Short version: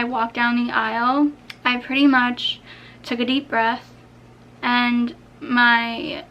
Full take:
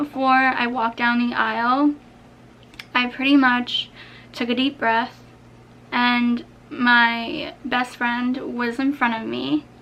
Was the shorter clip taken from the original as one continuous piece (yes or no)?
no